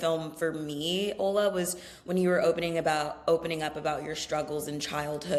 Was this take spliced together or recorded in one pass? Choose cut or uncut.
uncut